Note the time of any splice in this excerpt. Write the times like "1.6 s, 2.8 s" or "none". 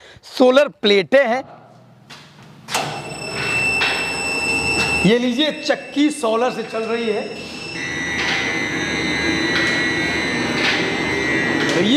1.4 s